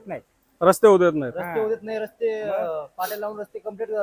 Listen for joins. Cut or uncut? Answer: uncut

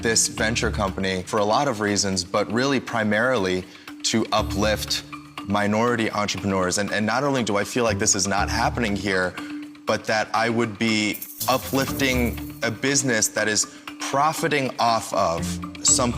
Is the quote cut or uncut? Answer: cut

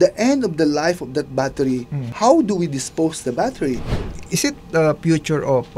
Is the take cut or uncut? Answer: cut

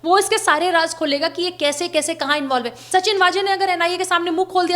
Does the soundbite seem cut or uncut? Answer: cut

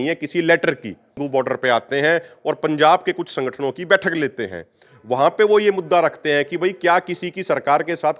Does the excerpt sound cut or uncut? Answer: cut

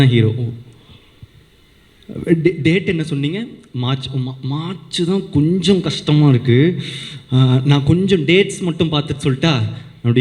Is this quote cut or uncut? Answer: uncut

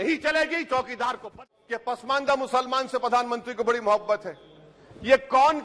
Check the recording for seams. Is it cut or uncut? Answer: cut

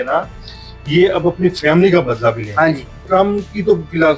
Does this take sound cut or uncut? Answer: cut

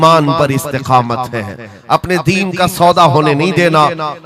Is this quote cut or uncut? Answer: uncut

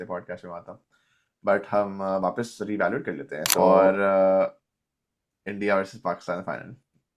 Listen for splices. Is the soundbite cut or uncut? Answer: cut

